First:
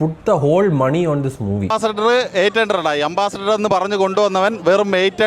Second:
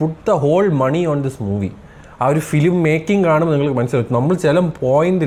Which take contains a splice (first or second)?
first